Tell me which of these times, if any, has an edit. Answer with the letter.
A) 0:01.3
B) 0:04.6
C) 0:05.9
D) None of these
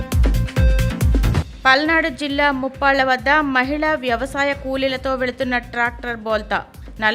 D